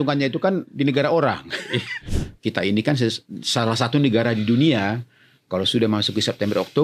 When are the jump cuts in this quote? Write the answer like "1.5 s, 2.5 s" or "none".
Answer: 2.1 s